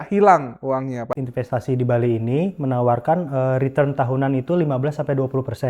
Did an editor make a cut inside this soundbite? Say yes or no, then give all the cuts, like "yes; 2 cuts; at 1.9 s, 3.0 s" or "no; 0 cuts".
yes; 1 cut; at 1.1 s